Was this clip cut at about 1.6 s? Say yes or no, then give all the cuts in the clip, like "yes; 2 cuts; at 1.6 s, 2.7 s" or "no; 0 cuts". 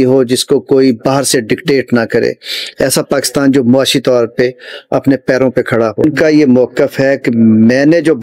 no; 1 cut; at 6.0 s